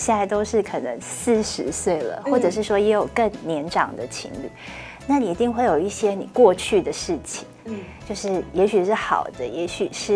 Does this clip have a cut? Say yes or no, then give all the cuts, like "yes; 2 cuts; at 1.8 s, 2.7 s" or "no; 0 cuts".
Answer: no; 0 cuts